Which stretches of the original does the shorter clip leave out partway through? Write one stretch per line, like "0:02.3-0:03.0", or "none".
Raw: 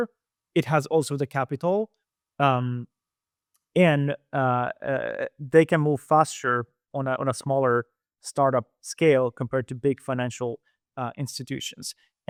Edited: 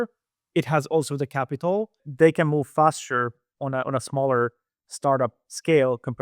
0:02.0-0:05.3